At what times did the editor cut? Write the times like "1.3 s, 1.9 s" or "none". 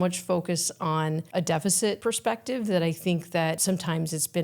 1.2 s, 2.0 s, 3.6 s